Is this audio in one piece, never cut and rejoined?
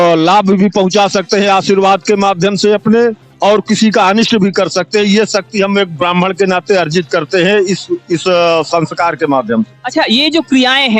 yes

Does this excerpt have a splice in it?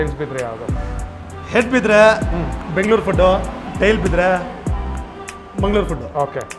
no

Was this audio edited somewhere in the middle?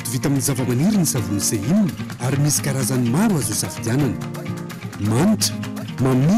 no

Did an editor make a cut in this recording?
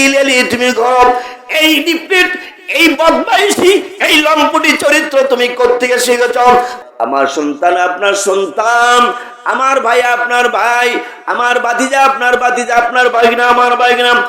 yes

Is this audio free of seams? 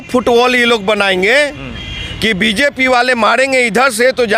yes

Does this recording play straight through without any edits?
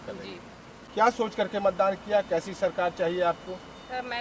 yes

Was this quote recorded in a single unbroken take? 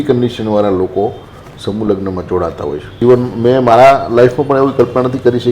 no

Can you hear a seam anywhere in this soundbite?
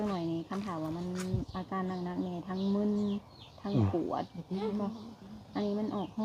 no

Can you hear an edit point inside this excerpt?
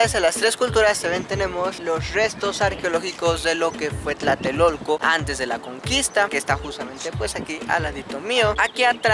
no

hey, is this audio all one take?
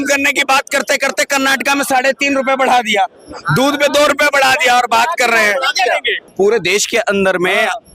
no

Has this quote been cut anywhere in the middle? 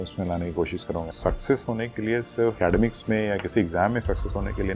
yes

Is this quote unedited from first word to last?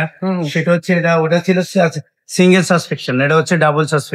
yes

